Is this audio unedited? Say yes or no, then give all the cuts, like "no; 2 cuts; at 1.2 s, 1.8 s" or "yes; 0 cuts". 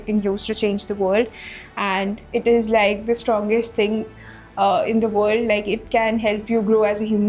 yes; 0 cuts